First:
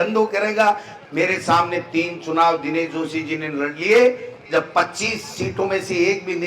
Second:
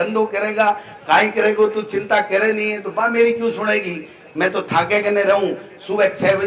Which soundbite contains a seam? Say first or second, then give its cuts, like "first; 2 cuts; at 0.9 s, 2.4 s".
first; 2 cuts; at 0.9 s, 4.3 s